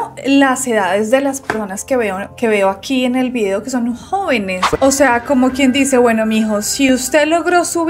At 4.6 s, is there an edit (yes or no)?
yes